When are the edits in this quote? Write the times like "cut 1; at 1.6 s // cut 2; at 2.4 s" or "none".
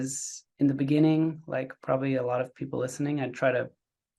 none